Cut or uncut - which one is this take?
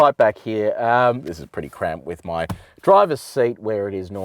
cut